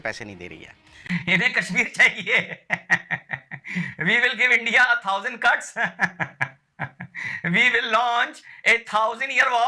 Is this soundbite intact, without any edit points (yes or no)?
yes